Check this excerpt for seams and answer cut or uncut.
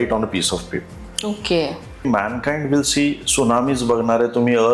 cut